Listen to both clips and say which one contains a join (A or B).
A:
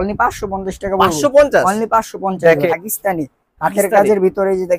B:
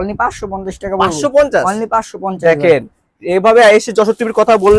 A